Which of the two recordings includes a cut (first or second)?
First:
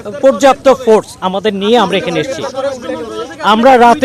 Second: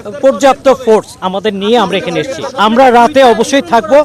second